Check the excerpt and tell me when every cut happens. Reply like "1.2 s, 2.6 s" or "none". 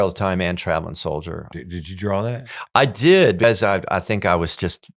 1.5 s, 3.4 s